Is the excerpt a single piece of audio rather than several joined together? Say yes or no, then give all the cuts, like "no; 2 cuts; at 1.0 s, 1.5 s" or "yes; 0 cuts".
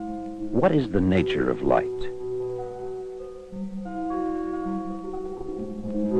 yes; 0 cuts